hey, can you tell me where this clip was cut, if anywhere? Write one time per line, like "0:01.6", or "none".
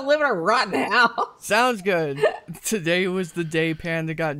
0:02.4